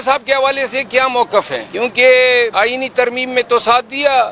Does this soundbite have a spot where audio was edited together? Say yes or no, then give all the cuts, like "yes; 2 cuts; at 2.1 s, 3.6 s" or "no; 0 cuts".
yes; 2 cuts; at 1.7 s, 2.5 s